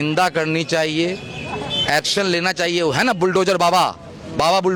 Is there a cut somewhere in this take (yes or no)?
no